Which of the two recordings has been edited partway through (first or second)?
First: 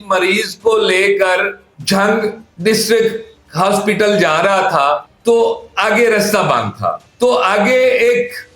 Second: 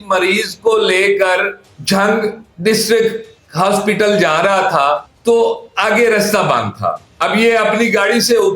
first